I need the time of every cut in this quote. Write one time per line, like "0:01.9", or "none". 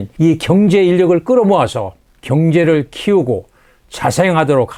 none